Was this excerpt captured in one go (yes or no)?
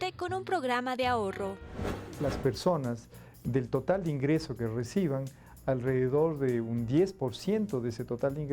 no